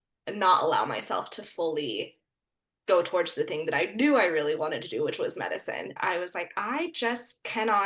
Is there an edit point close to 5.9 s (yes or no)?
yes